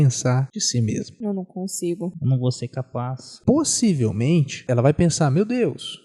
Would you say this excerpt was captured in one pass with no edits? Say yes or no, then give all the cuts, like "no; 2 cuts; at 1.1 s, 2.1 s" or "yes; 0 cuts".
no; 4 cuts; at 0.9 s, 2.2 s, 3.3 s, 4.6 s